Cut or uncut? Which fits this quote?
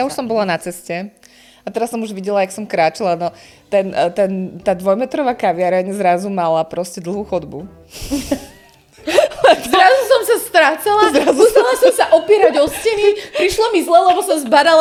uncut